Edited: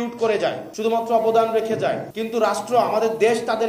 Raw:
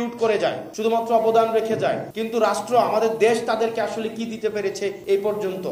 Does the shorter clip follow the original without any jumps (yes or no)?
yes